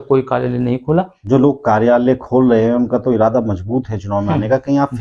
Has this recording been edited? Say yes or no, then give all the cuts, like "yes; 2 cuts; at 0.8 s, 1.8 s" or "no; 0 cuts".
yes; 1 cut; at 1.2 s